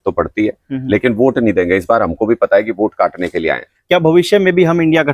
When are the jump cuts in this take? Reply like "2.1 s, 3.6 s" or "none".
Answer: 3.7 s